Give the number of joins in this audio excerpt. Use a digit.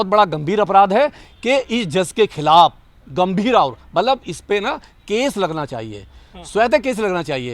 1